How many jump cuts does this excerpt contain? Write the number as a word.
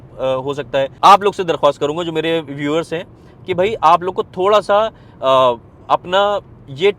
one